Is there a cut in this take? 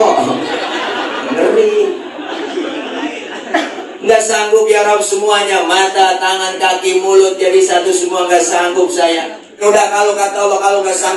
yes; 1 cut; at 9.6 s

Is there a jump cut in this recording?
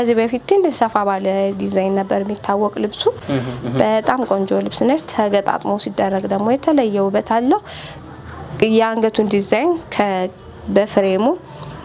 no; 0 cuts

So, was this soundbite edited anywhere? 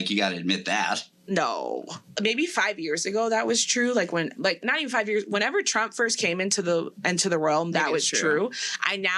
yes; 1 cut; at 2.1 s

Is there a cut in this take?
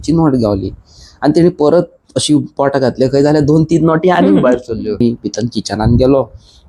yes; 1 cut; at 5.0 s

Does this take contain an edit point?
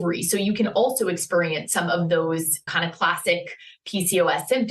yes; 1 cut; at 2.7 s

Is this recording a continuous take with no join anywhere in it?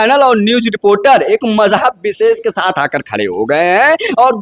yes; 0 cuts

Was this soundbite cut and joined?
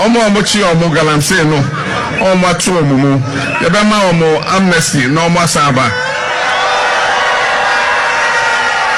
no; 0 cuts

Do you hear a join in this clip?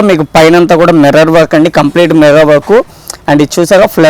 no; 0 cuts

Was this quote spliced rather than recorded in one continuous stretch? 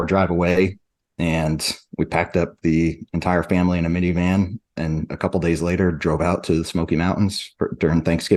no; 0 cuts

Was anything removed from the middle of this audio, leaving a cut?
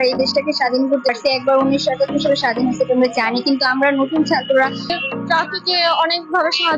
yes; 2 cuts; at 1.1 s, 4.9 s

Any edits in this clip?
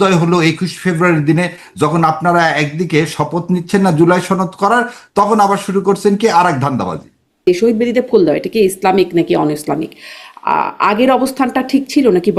yes; 1 cut; at 7.4 s

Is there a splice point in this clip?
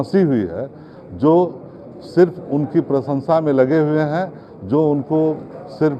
no; 0 cuts

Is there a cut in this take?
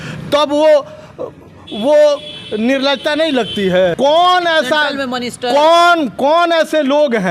yes; 1 cut; at 3.9 s

